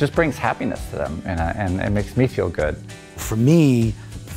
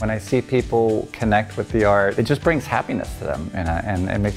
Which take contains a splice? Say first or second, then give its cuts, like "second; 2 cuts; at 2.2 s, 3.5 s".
first; 1 cut; at 3.3 s